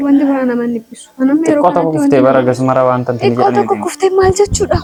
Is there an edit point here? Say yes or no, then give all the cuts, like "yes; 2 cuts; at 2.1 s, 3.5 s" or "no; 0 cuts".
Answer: no; 0 cuts